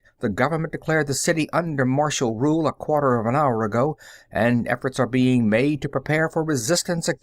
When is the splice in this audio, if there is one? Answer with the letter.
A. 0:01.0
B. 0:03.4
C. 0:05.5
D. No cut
B